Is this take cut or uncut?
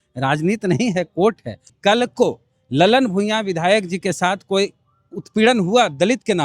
cut